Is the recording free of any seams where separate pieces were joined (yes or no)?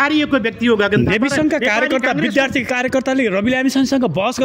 yes